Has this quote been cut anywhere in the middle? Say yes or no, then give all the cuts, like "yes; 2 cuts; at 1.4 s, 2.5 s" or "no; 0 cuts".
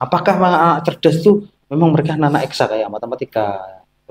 no; 0 cuts